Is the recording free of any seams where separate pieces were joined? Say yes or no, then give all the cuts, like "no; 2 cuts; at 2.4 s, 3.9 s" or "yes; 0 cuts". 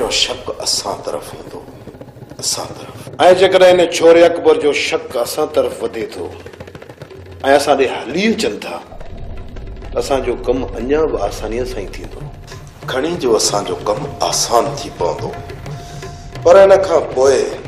no; 1 cut; at 10.0 s